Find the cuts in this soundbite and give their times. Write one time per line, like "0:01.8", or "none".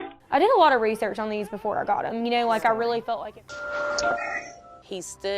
0:03.0